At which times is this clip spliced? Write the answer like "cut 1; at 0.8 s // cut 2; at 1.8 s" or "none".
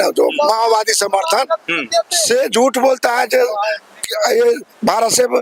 none